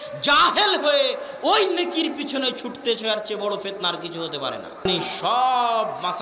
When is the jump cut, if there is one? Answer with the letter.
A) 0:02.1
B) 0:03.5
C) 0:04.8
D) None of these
C